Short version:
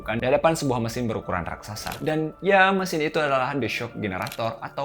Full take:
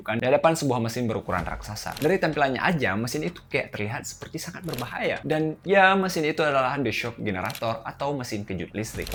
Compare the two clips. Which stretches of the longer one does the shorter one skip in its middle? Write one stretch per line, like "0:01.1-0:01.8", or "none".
0:02.0-0:05.2